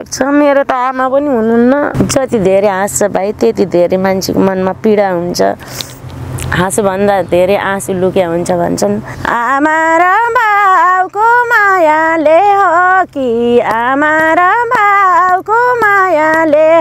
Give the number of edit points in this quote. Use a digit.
2